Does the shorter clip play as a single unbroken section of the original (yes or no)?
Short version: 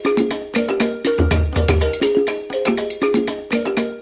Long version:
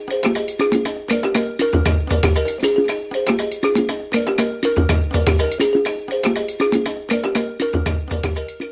no